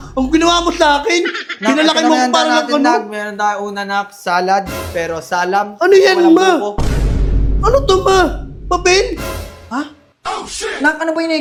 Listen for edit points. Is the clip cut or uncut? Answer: uncut